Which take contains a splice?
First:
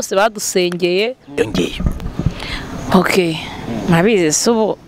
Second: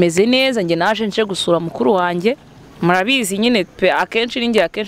first; 1 cut; at 1.3 s

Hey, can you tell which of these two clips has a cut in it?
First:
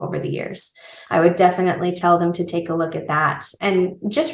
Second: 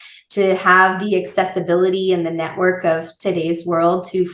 first; 2 cuts; at 0.9 s, 3.5 s

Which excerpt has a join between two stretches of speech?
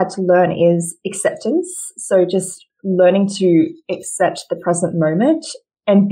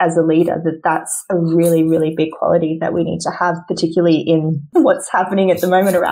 second; 1 cut; at 4.7 s

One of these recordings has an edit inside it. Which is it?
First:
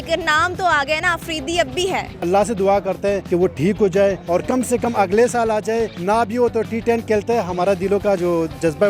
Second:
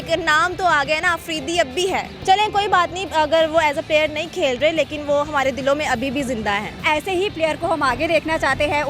first; 4 cuts; at 2.1 s, 3.2 s, 4.2 s, 5.9 s

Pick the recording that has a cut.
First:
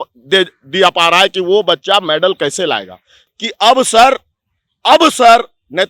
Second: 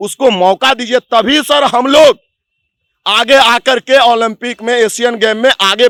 first; 1 cut; at 3.2 s

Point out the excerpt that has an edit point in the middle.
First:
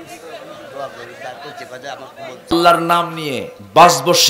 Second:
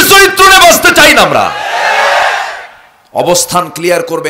first; 1 cut; at 2.5 s

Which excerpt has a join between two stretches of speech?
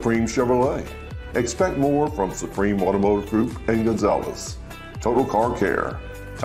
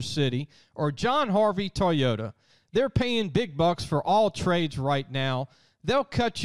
first; 1 cut; at 4.6 s

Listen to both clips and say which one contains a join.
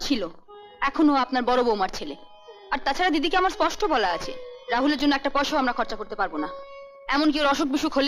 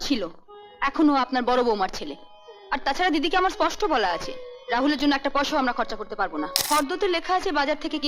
second; 1 cut; at 6.6 s

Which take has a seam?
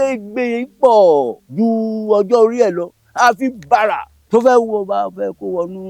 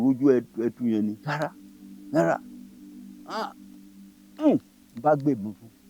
first; 2 cuts; at 1.4 s, 4.1 s

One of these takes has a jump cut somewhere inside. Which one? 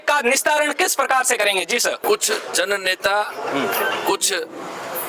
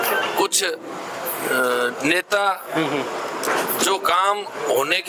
first; 1 cut; at 2.0 s

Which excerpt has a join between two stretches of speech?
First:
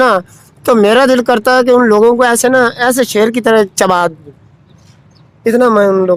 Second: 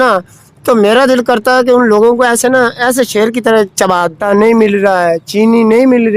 second; 1 cut; at 4.2 s

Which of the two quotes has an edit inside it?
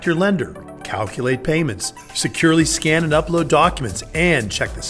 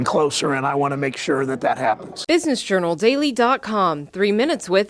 second; 1 cut; at 2.1 s

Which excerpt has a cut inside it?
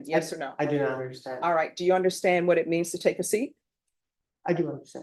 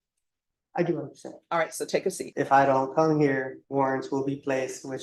second; 2 cuts; at 2.2 s, 3.6 s

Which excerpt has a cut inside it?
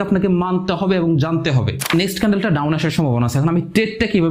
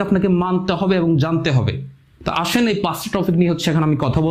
first; 1 cut; at 1.9 s

